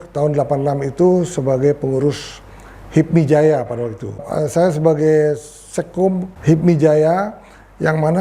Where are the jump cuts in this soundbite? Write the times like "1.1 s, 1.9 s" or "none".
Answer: 4.3 s, 6.3 s

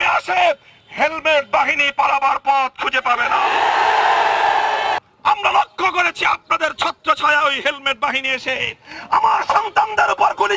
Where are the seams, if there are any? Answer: 5.0 s

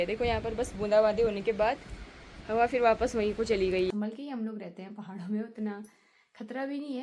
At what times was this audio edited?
3.9 s

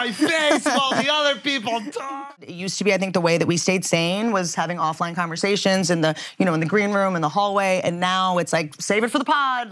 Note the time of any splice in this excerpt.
2.4 s

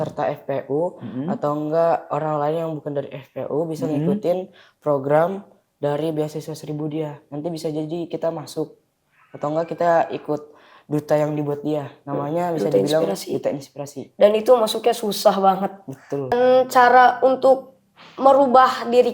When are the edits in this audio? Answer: 16.3 s

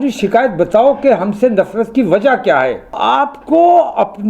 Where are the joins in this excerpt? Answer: 3.0 s

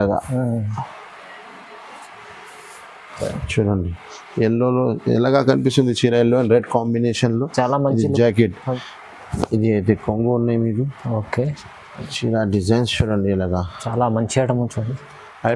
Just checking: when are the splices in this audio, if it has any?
8.6 s

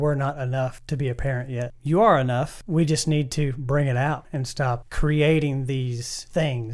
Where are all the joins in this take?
2.6 s

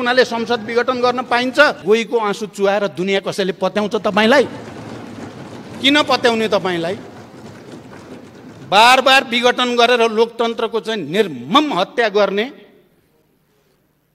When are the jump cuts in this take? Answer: 1.8 s

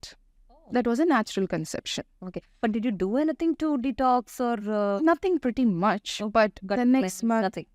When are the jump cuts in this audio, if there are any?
none

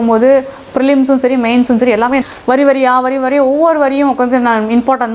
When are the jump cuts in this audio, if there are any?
2.2 s

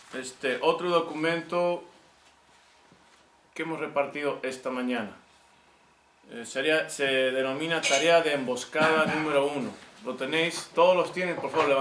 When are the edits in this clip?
1.9 s

